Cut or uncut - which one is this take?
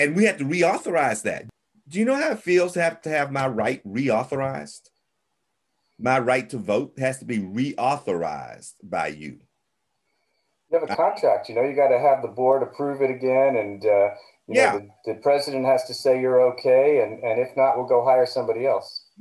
cut